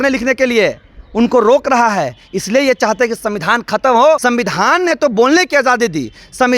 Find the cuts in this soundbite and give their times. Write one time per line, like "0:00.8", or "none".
0:04.2